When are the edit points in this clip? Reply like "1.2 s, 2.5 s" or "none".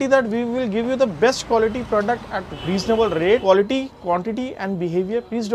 2.5 s, 3.4 s